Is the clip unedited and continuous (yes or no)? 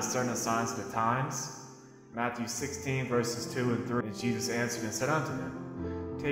yes